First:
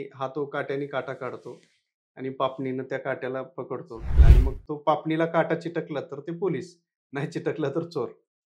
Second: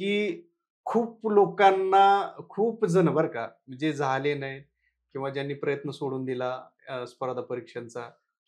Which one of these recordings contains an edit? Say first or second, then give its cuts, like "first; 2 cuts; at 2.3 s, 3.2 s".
first; 1 cut; at 4.2 s